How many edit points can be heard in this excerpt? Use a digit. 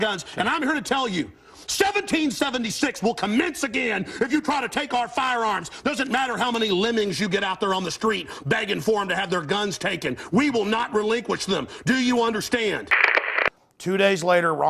1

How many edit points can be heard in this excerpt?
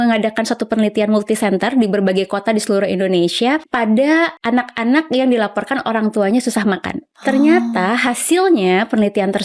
2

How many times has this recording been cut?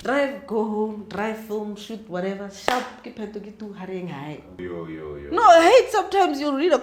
1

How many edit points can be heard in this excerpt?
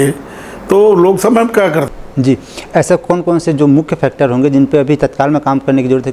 1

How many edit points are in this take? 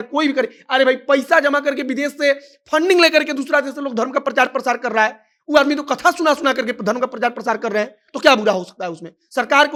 0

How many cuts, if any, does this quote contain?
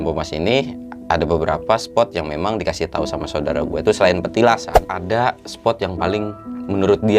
1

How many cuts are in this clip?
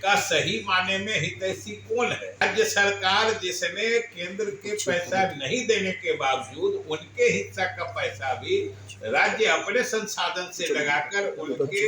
1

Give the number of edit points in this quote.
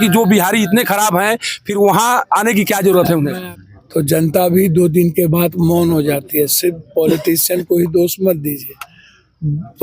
1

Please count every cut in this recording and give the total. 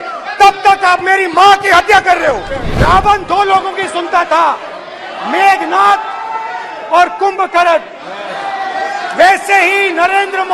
1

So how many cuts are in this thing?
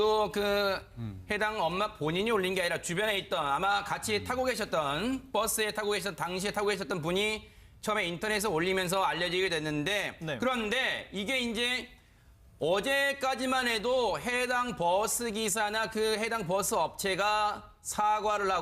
1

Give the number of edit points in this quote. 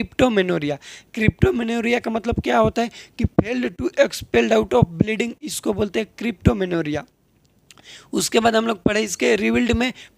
0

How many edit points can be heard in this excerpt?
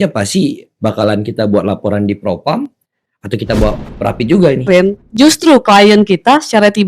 1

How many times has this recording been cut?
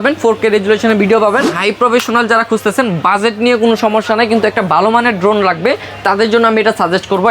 1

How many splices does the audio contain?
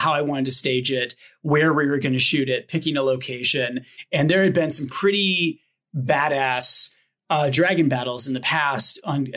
1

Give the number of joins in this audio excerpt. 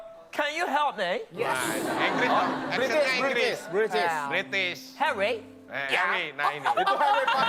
0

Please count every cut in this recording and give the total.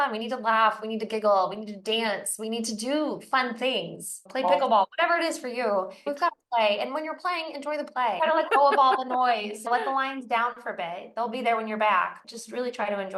5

